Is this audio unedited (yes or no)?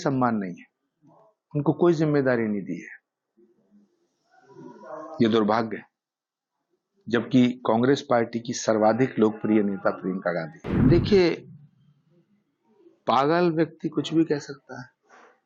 no